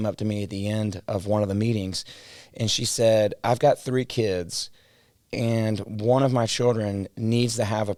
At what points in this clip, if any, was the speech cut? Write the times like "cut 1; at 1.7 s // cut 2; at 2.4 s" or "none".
none